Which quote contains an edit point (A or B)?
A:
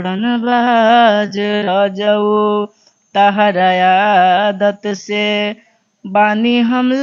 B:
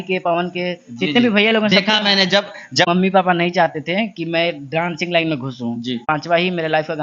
B